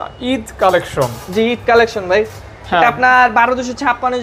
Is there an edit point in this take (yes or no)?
no